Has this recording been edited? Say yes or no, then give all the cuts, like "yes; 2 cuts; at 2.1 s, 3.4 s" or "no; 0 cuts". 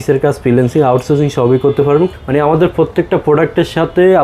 yes; 1 cut; at 2.1 s